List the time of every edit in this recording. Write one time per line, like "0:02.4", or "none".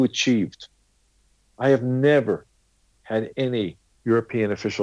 0:03.9